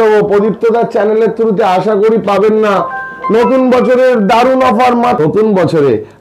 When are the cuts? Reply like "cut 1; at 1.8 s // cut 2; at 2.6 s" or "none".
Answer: cut 1; at 5.2 s

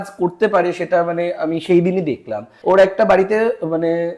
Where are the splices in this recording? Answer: cut 1; at 2.5 s

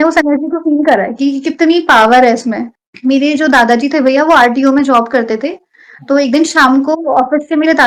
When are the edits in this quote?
cut 1; at 2.7 s

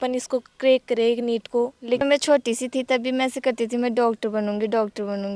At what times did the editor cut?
cut 1; at 2.0 s

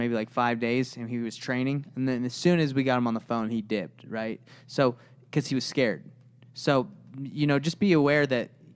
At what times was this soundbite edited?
none

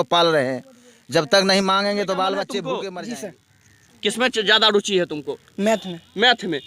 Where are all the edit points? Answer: cut 1; at 2.8 s

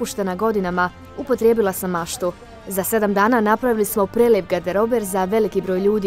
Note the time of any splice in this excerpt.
cut 1; at 2.5 s

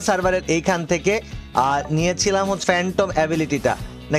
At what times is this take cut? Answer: cut 1; at 2.6 s

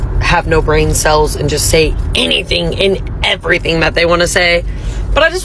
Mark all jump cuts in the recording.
none

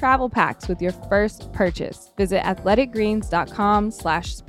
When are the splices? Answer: cut 1; at 2.1 s

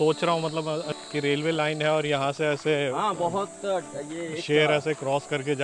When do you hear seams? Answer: cut 1; at 0.9 s

